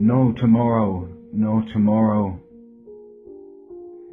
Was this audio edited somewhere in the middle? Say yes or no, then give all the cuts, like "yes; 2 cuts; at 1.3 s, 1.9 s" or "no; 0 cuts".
yes; 1 cut; at 2.8 s